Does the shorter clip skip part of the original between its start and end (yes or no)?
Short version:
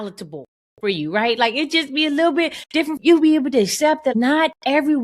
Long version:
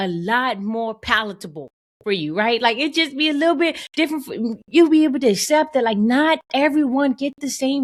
yes